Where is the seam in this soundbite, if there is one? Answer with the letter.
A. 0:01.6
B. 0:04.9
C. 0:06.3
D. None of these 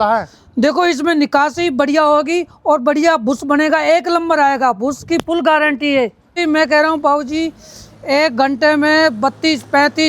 C